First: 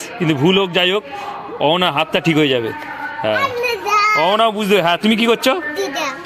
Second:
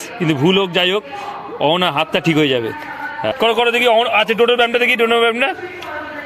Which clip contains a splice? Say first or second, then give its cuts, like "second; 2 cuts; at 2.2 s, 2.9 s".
second; 1 cut; at 3.3 s